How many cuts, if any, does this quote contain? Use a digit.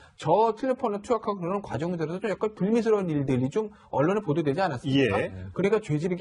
1